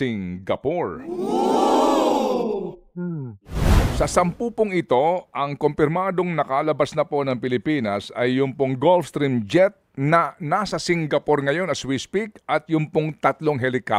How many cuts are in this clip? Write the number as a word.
one